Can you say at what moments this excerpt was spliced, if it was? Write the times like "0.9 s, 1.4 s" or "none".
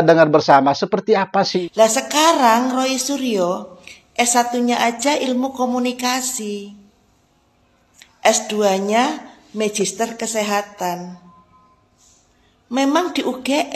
1.5 s